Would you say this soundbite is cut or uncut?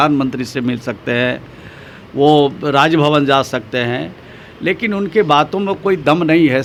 uncut